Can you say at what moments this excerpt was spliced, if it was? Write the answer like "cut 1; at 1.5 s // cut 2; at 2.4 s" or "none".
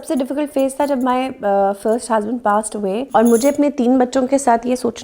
cut 1; at 3.1 s